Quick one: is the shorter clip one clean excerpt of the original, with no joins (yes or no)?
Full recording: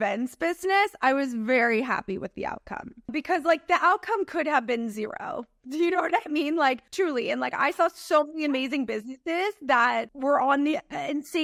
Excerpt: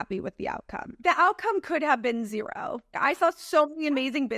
no